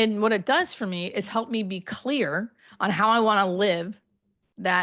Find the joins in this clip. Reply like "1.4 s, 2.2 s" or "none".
none